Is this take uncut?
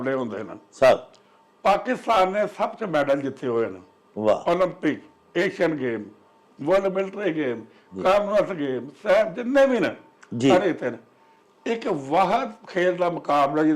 yes; 0 cuts

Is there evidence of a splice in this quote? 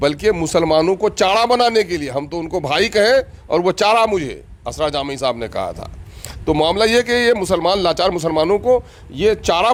no; 0 cuts

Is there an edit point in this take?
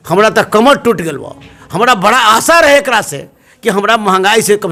no; 0 cuts

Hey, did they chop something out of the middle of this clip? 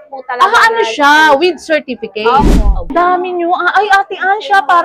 yes; 1 cut; at 2.9 s

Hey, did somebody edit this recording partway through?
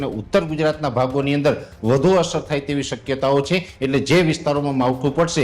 yes; 1 cut; at 3.7 s

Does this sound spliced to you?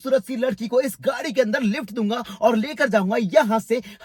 no; 0 cuts

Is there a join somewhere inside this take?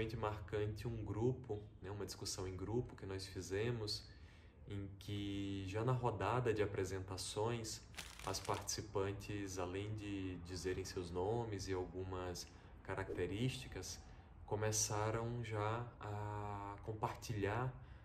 no; 0 cuts

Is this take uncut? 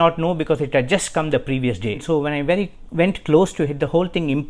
no; 1 cut; at 2.0 s

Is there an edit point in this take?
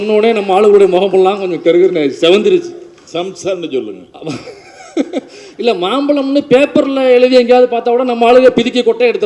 no; 0 cuts

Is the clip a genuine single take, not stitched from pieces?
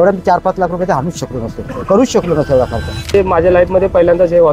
no; 1 cut; at 3.1 s

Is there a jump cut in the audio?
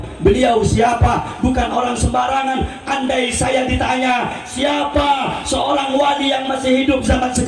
no; 0 cuts

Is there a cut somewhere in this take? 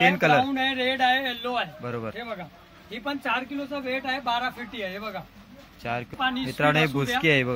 yes; 1 cut; at 6.1 s

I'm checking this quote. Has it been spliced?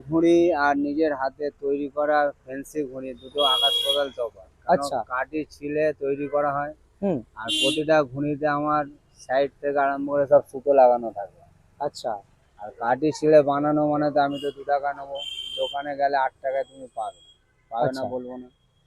no; 0 cuts

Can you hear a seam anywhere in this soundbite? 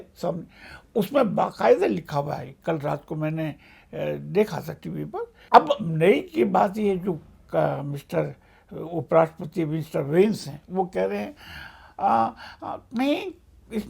yes; 1 cut; at 5.3 s

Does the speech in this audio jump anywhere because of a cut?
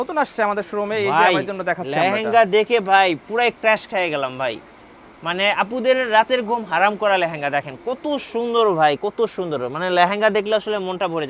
no; 0 cuts

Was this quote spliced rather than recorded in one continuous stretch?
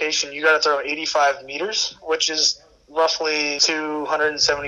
yes; 1 cut; at 3.6 s

